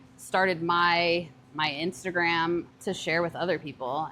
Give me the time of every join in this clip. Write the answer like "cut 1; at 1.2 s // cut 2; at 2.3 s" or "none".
cut 1; at 2.7 s